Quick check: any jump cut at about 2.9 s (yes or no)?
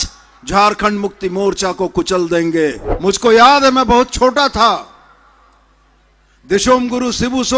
yes